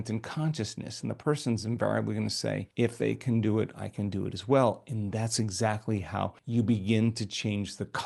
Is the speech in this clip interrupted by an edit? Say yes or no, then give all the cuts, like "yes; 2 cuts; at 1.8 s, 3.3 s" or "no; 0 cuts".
yes; 2 cuts; at 2.7 s, 6.4 s